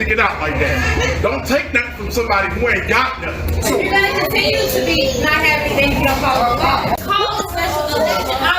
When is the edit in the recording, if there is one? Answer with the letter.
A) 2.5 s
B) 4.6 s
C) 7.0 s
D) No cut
C